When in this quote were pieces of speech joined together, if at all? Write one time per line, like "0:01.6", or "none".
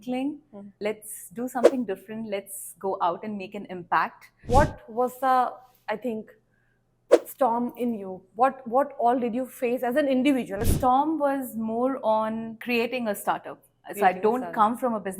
0:04.5
0:10.6